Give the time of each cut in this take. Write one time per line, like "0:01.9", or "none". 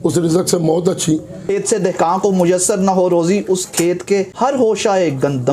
0:01.4
0:04.3